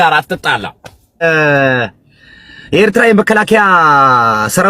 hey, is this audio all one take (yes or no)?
no